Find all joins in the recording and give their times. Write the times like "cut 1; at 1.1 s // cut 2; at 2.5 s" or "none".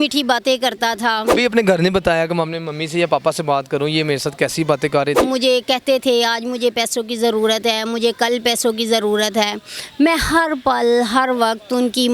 cut 1; at 1.3 s // cut 2; at 5.2 s